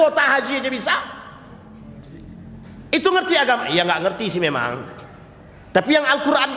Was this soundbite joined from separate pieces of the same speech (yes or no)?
no